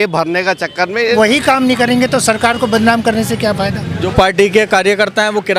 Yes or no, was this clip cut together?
yes